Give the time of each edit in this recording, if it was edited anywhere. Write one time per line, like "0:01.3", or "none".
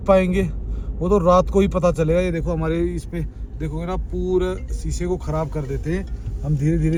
none